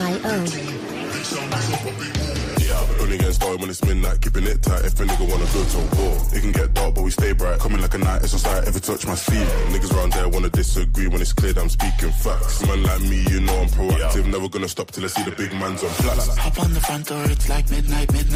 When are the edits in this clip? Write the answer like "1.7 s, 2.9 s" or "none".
none